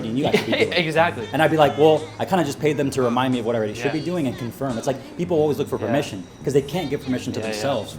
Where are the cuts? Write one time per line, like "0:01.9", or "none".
none